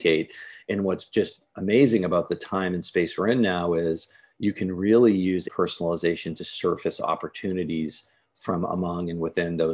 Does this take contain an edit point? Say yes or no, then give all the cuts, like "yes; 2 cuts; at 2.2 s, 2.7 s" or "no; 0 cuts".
yes; 1 cut; at 5.5 s